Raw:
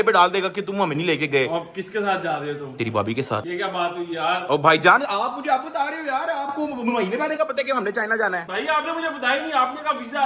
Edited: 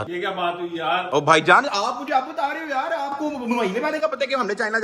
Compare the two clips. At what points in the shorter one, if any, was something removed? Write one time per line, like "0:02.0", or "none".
none

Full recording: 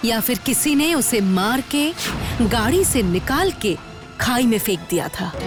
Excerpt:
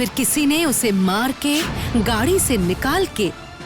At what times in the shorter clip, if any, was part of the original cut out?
0:01.8

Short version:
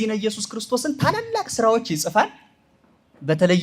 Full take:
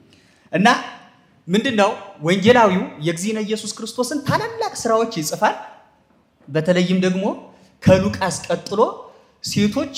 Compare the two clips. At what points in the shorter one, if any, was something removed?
none

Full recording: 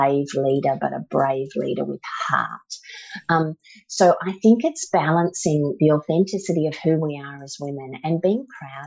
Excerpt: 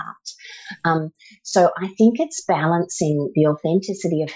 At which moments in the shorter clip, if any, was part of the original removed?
none

